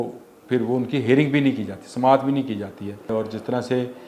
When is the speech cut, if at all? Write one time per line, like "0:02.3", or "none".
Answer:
0:03.1